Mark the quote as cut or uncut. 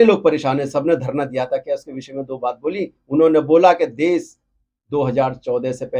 uncut